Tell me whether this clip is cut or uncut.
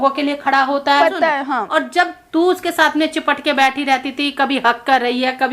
cut